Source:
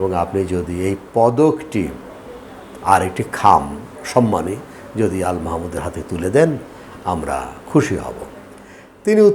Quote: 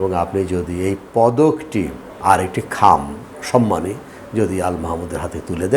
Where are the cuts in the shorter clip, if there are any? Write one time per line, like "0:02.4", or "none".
0:02.0